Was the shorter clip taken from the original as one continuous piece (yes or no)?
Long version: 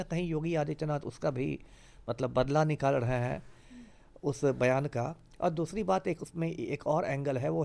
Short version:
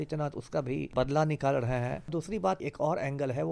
no